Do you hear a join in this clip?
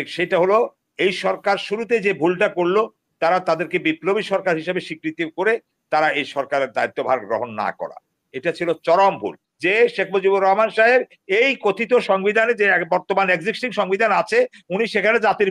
yes; 1 cut; at 9.5 s

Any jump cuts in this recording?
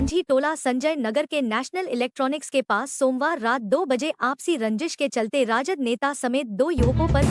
no; 0 cuts

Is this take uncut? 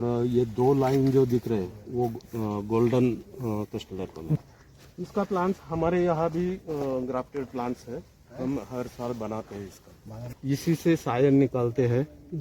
no; 2 cuts; at 4.4 s, 10.3 s

